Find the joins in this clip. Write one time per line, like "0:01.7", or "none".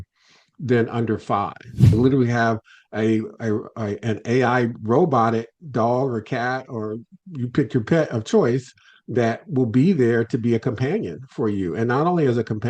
0:01.9